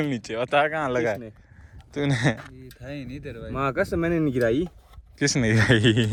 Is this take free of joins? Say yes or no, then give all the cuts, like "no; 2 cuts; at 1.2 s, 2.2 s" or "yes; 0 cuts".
yes; 0 cuts